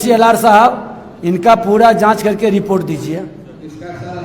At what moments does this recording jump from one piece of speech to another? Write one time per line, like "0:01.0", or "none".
none